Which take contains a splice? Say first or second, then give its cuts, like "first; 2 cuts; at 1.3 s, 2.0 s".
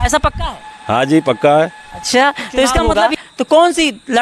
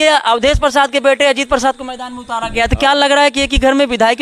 first; 1 cut; at 3.0 s